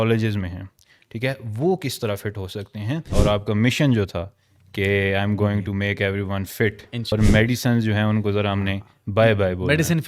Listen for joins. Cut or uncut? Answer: cut